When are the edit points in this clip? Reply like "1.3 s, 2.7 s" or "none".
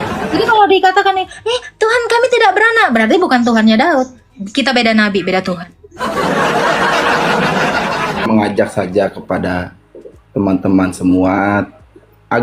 8.3 s